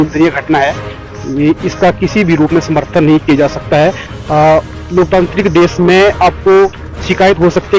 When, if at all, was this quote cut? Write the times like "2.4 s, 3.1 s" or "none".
none